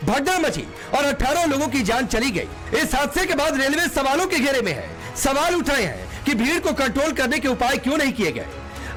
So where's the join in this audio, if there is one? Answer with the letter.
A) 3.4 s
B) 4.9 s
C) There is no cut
C